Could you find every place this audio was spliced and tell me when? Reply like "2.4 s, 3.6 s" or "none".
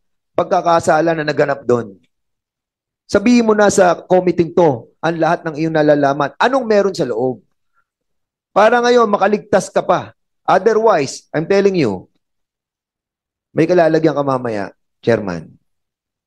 none

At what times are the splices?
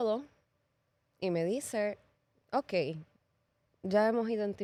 none

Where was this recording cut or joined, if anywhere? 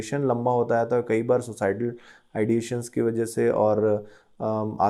none

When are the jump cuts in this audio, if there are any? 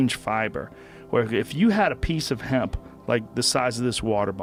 none

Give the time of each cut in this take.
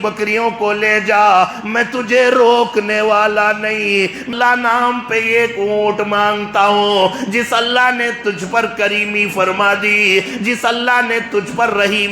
4.3 s

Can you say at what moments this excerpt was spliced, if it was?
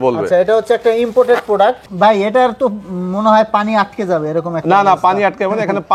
1.9 s

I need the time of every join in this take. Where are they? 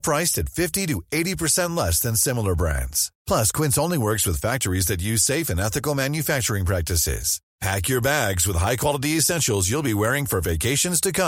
none

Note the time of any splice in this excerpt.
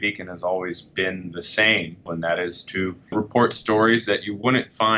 2.1 s

